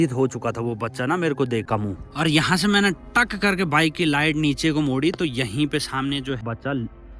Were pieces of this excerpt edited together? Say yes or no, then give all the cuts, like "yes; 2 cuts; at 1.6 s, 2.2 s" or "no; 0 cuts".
yes; 2 cuts; at 1.6 s, 6.4 s